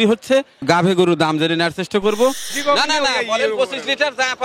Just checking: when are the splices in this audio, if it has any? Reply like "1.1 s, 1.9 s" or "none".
2.5 s